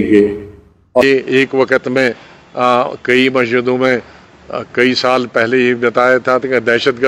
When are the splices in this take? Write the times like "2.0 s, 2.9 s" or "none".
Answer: 1.0 s